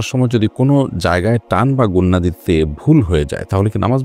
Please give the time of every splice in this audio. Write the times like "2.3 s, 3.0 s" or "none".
none